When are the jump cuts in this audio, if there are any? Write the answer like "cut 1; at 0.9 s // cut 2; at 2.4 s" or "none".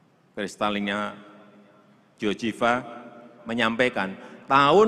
none